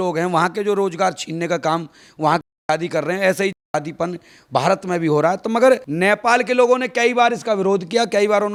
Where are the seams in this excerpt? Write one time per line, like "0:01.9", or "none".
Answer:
none